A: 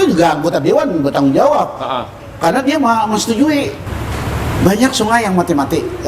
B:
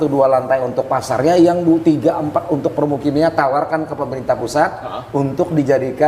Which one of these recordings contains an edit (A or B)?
A